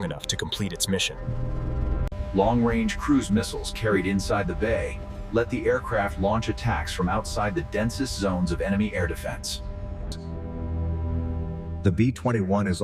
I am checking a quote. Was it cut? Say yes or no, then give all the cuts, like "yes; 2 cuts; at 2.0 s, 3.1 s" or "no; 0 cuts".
yes; 2 cuts; at 2.1 s, 10.1 s